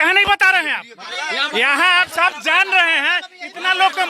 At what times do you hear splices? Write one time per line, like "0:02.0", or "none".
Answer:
0:01.1